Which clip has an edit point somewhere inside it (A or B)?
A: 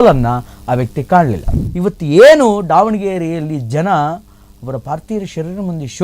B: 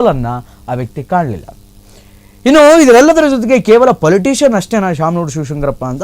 A